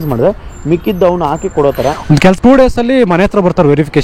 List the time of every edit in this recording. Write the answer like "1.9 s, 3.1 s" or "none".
2.4 s